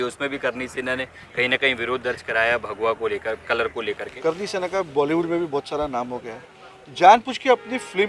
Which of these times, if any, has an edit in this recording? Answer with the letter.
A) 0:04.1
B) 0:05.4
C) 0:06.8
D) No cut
A